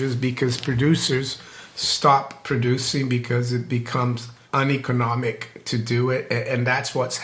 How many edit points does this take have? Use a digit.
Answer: 1